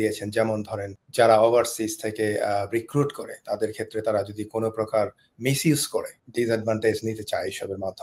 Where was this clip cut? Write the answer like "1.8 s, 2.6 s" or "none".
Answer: 1.0 s, 6.2 s